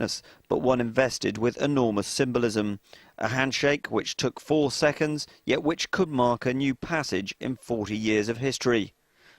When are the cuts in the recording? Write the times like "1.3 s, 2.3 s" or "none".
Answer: 4.7 s